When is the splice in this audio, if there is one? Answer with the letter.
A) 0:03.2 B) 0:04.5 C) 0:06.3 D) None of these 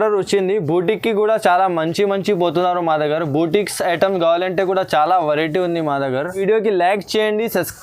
C